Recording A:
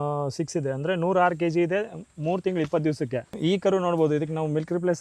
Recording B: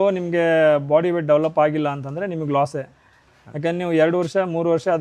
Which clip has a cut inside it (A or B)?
A